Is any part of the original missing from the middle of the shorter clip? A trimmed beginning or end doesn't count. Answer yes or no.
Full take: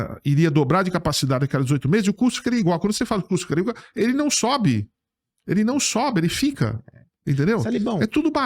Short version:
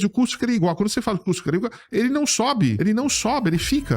yes